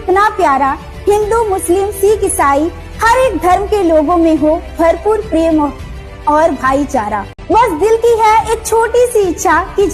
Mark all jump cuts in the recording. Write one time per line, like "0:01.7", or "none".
0:07.3